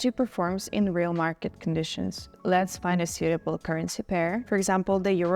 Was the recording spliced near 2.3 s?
yes; 2 cuts; at 2.3 s, 4.4 s

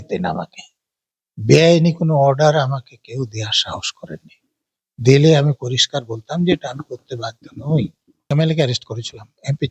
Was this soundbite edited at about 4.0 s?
no; 1 cut; at 8.1 s

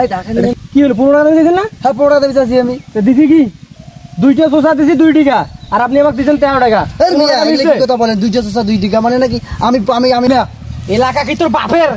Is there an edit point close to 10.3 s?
yes; 1 cut; at 10.3 s

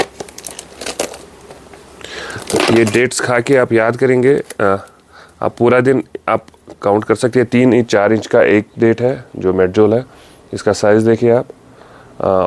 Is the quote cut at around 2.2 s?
no; 0 cuts

